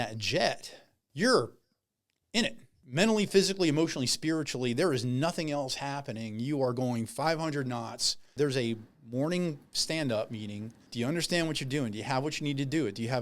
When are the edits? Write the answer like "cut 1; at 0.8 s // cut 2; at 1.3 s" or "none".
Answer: cut 1; at 1.0 s // cut 2; at 2.8 s // cut 3; at 8.3 s // cut 4; at 10.8 s